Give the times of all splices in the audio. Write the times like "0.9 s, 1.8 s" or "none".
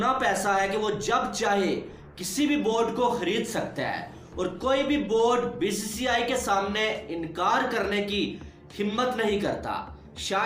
none